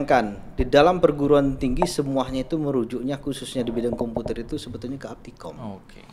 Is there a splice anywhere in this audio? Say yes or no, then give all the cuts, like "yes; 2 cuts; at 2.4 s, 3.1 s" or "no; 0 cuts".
no; 0 cuts